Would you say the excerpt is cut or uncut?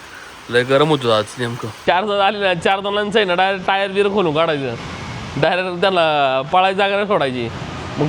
cut